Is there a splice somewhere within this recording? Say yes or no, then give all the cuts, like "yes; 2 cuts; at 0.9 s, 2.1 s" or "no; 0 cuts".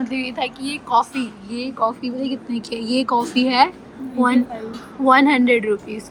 no; 0 cuts